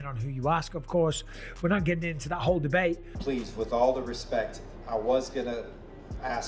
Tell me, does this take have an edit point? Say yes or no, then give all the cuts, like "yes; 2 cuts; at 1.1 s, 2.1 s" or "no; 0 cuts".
yes; 1 cut; at 3.1 s